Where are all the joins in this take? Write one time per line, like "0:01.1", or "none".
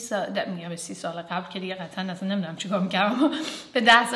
none